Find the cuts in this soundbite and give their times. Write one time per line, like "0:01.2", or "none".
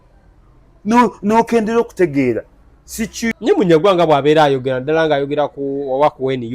0:03.3